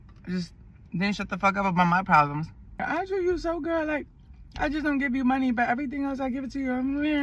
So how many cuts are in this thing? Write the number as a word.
one